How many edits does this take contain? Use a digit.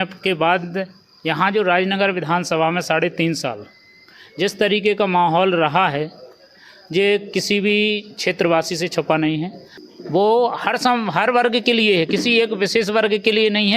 1